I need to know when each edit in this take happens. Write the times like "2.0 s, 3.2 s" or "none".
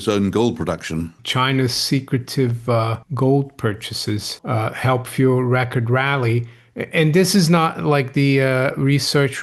1.2 s, 3.0 s, 4.3 s